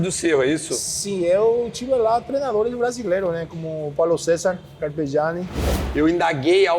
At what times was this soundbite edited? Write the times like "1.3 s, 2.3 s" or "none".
5.6 s